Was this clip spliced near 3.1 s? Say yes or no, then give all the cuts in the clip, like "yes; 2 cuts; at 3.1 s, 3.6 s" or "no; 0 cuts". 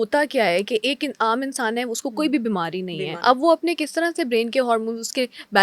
yes; 1 cut; at 3.1 s